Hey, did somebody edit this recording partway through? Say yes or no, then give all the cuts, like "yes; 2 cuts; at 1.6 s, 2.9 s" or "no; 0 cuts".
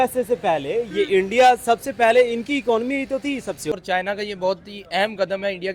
yes; 1 cut; at 3.8 s